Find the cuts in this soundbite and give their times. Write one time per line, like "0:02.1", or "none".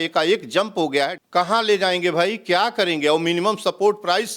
0:01.2